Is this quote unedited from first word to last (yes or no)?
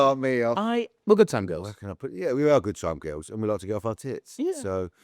no